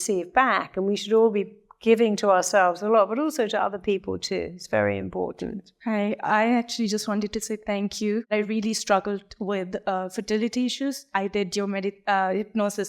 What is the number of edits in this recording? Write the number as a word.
three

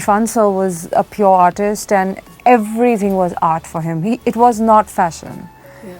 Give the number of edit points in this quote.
two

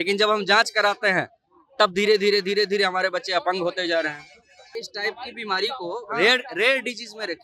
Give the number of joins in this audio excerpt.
one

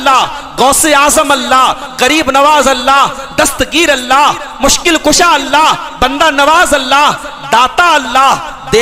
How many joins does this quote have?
zero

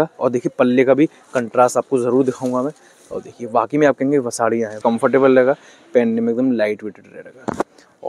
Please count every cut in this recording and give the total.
one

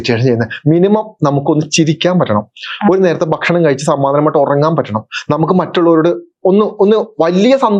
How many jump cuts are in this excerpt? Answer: zero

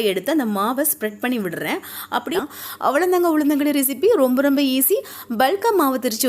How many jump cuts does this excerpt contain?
one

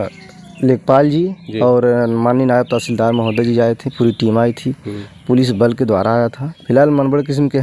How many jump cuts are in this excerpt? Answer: one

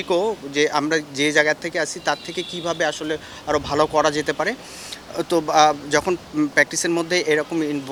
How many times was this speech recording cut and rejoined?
zero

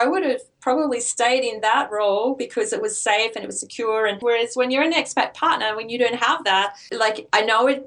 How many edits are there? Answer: two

